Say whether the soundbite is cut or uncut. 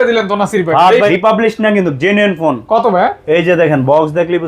cut